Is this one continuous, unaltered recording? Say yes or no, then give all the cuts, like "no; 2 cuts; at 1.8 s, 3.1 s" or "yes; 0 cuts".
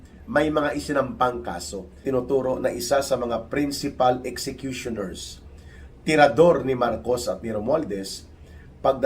no; 1 cut; at 2.0 s